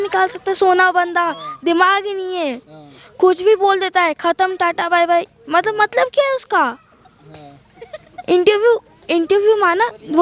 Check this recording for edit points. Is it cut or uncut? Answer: uncut